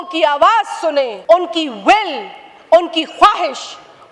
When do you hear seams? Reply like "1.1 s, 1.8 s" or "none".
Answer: 1.1 s